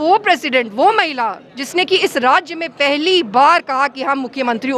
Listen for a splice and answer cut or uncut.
uncut